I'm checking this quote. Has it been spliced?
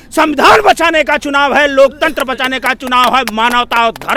no; 0 cuts

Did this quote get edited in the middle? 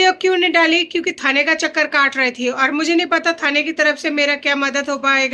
no; 0 cuts

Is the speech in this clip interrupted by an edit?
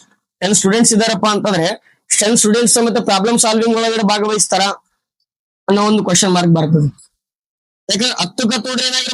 no; 0 cuts

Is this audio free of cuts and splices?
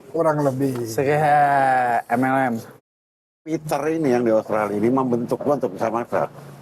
no; 1 cut; at 2.9 s

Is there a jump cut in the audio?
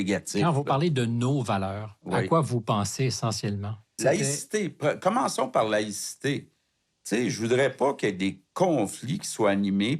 yes; 1 cut; at 4.0 s

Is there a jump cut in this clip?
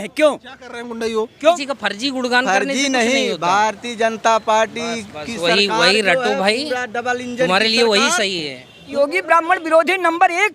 yes; 2 cuts; at 1.6 s, 8.8 s

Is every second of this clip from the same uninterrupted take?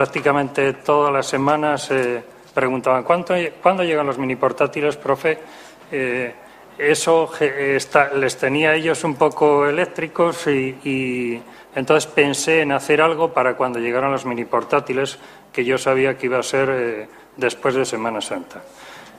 no; 1 cut; at 2.3 s

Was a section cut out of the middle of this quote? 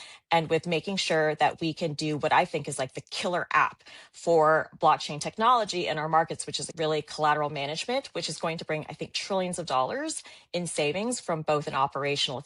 yes; 1 cut; at 6.7 s

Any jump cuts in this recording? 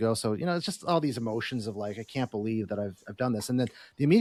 no; 0 cuts

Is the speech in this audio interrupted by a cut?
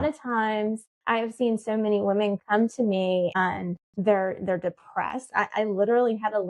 yes; 2 cuts; at 0.9 s, 3.4 s

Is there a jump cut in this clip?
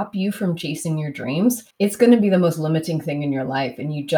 yes; 1 cut; at 1.7 s

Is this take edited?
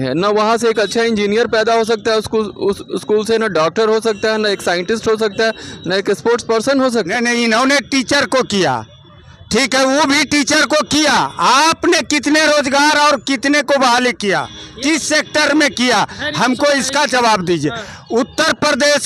yes; 1 cut; at 7.1 s

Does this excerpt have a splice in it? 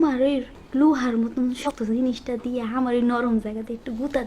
yes; 1 cut; at 1.7 s

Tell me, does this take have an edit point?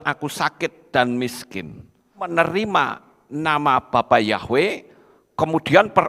yes; 1 cut; at 2.3 s

